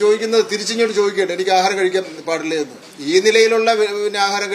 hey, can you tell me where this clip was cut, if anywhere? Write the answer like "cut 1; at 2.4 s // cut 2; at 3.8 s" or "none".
cut 1; at 2.9 s

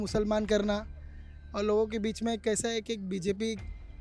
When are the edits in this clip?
none

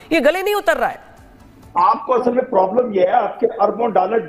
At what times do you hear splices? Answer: cut 1; at 1.5 s

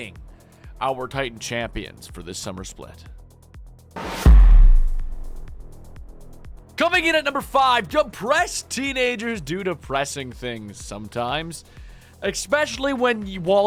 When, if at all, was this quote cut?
none

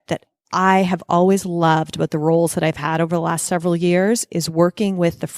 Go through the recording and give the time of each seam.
none

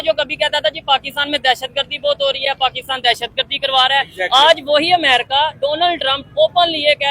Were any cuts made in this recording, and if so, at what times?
none

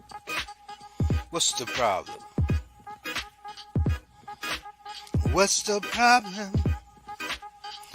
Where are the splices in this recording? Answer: cut 1; at 1.1 s

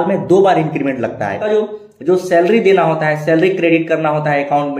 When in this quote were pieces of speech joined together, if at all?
cut 1; at 1.4 s

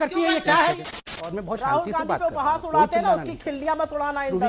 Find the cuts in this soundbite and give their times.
cut 1; at 0.9 s

